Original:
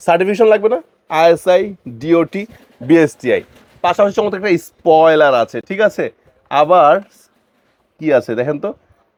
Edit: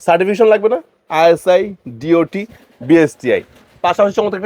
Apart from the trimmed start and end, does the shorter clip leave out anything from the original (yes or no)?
no